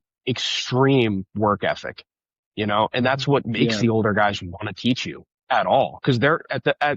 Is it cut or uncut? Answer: uncut